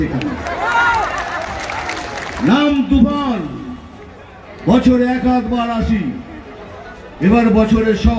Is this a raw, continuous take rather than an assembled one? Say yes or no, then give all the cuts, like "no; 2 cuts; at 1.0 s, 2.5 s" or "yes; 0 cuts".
no; 1 cut; at 1.5 s